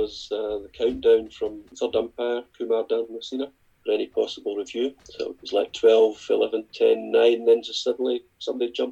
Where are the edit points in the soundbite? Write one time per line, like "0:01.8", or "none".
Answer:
0:01.6
0:03.7
0:05.0